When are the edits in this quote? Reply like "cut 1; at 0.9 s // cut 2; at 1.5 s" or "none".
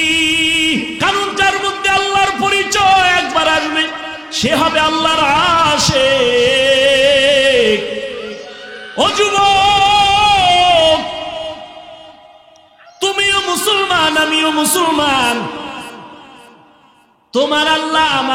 cut 1; at 0.9 s